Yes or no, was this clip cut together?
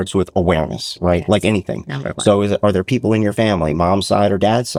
no